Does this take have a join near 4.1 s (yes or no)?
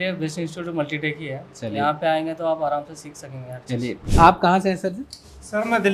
yes